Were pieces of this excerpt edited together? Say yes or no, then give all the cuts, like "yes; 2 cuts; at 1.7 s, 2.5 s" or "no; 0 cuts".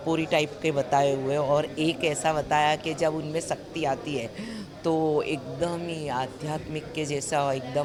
no; 0 cuts